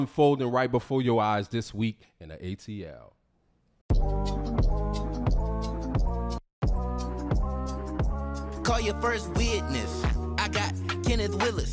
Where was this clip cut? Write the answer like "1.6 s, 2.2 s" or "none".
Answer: 3.7 s

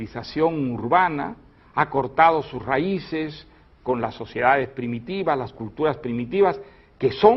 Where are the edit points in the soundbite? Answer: 5.4 s

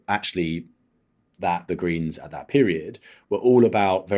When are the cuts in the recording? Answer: 1.6 s

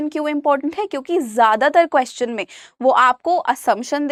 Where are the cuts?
none

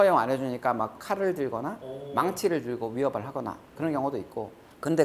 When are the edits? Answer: 1.0 s

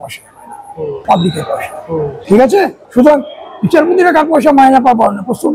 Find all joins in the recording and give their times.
1.0 s, 2.2 s, 2.8 s

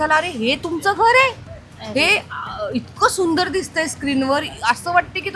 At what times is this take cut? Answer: none

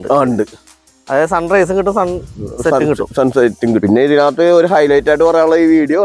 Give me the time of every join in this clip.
3.8 s

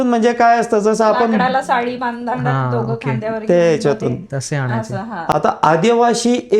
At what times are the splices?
5.3 s

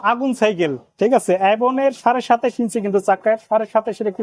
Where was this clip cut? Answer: none

